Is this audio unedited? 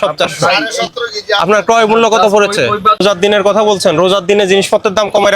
no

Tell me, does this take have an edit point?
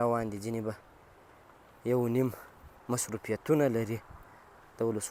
no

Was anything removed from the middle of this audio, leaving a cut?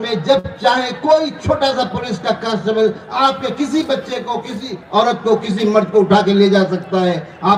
no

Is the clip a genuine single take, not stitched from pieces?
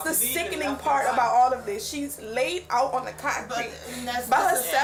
yes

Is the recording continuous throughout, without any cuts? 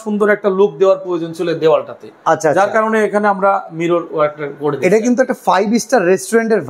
yes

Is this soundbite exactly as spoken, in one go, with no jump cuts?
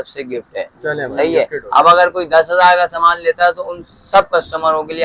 yes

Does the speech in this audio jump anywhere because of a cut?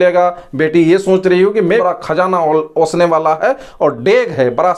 yes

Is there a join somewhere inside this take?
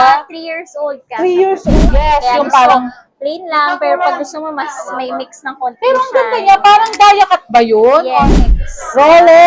yes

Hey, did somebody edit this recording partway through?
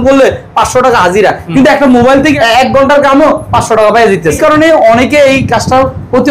yes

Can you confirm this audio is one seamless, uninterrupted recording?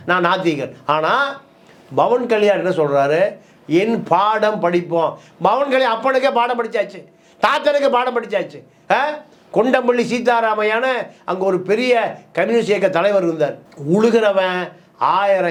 yes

